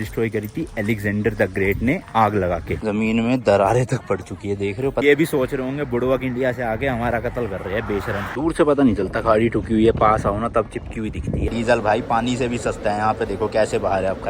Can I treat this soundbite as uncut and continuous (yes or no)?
no